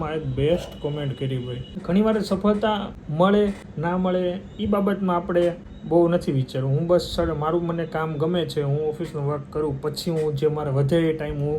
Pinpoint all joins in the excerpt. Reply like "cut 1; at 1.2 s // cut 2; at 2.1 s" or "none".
cut 1; at 1.7 s // cut 2; at 3.0 s // cut 3; at 3.7 s // cut 4; at 5.7 s